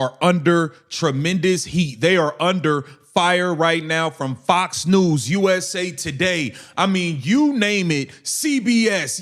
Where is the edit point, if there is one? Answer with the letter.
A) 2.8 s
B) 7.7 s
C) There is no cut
B